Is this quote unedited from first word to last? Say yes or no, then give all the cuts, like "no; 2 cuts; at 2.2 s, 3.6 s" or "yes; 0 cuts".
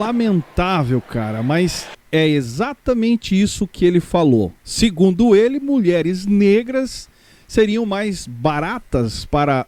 yes; 0 cuts